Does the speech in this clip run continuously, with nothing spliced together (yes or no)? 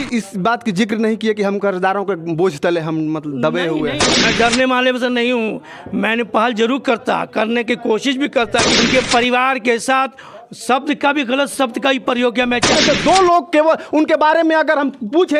no